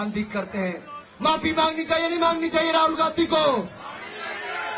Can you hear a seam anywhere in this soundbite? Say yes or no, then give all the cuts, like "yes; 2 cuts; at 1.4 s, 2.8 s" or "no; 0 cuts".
no; 0 cuts